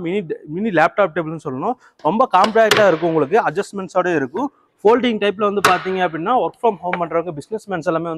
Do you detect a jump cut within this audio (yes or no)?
no